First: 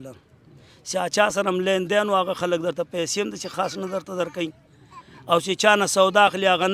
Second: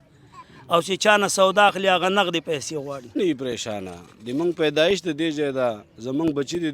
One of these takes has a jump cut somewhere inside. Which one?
second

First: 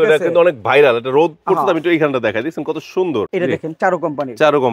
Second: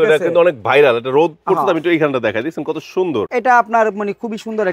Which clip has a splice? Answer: first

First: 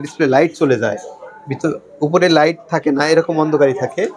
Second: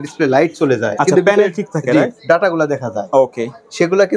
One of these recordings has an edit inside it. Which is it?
second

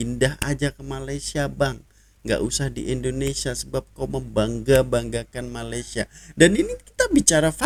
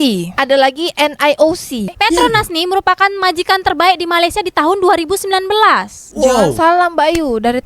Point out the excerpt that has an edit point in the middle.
second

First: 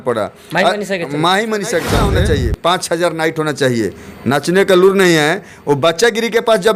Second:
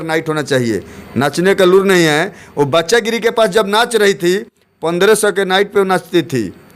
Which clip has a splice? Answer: first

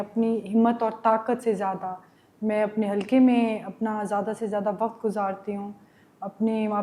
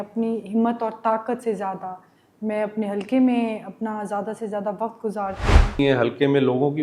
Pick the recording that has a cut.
second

